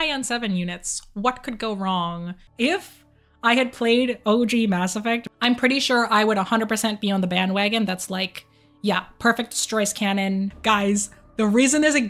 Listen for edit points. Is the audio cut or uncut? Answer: cut